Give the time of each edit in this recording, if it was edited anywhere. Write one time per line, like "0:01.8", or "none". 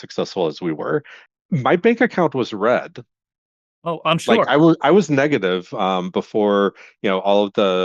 0:01.2